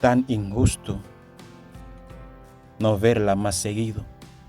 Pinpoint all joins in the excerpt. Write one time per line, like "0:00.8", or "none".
0:01.0
0:02.6